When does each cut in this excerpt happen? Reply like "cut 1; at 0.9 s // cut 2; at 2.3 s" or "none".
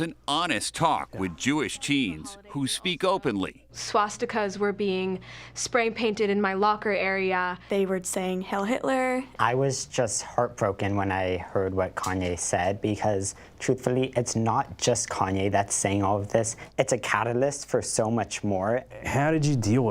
cut 1; at 12.9 s // cut 2; at 19.0 s